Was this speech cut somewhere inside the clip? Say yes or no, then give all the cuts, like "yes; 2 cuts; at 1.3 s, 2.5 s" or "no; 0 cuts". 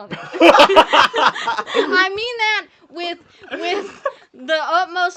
no; 0 cuts